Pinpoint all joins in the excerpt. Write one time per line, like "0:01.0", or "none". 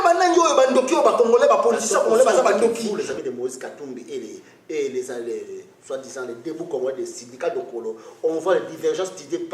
0:02.9